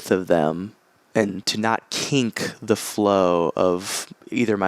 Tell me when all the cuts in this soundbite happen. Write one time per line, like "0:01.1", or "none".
0:01.4